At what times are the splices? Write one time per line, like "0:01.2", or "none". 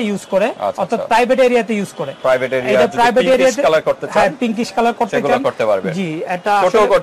none